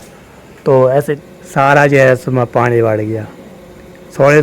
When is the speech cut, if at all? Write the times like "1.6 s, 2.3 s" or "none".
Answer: 1.3 s